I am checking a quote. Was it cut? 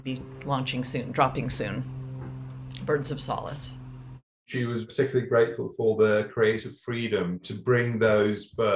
yes; 1 cut; at 4.5 s

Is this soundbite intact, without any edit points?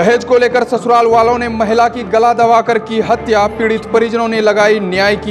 yes; 0 cuts

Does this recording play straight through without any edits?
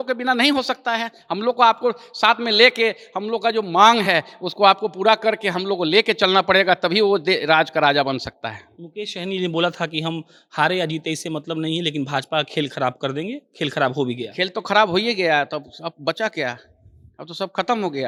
yes; 0 cuts

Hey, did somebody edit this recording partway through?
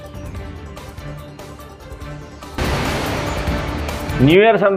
no; 0 cuts

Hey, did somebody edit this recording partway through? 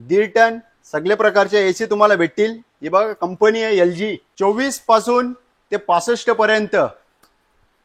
yes; 1 cut; at 4.2 s

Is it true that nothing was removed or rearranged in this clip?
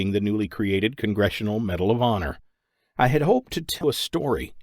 no; 1 cut; at 1.2 s

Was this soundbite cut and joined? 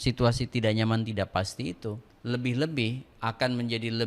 yes; 1 cut; at 2.1 s

